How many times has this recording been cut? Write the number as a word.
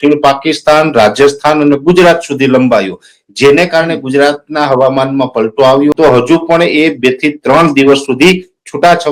one